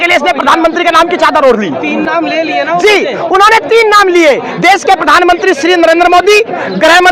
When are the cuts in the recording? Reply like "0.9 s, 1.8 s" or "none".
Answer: none